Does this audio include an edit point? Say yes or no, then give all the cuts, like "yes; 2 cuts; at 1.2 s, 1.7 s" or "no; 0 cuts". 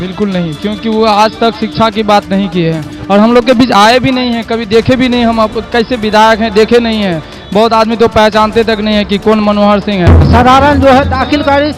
yes; 1 cut; at 10.2 s